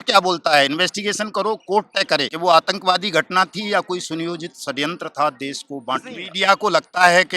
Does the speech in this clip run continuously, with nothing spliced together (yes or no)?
no